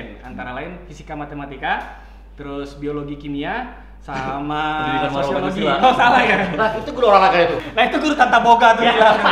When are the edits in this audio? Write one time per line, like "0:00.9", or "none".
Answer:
0:07.6